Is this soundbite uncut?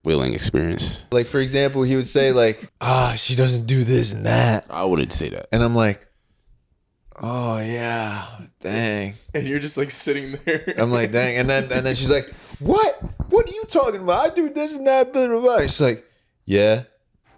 no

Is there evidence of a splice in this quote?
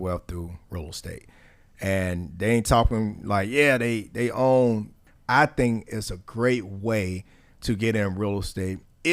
yes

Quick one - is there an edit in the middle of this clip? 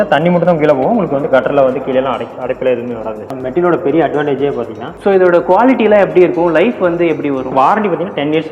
yes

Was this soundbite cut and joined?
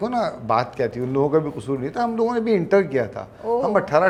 no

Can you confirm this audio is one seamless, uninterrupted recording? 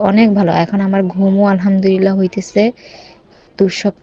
yes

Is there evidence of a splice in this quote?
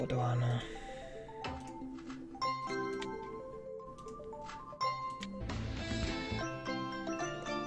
no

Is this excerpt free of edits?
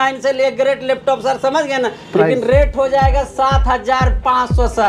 yes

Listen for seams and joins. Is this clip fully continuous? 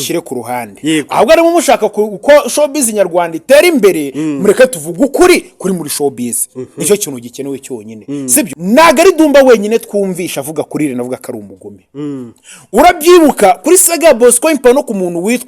no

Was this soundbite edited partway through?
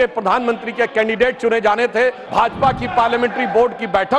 yes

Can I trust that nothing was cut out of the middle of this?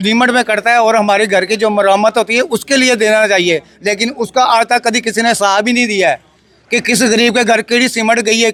yes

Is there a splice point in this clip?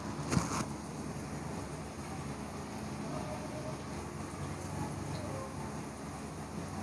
yes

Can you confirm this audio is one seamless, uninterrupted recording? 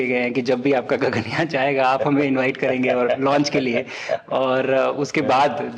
yes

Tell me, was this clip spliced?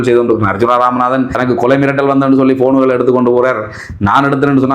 yes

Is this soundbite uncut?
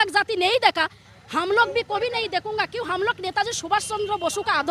yes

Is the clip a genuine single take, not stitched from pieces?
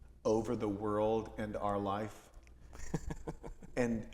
yes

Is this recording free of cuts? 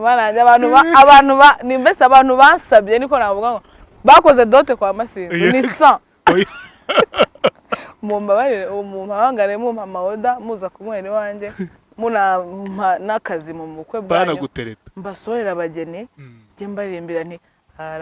yes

